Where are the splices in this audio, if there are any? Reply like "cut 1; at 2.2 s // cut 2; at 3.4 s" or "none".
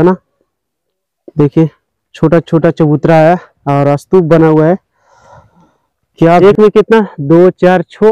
cut 1; at 6.4 s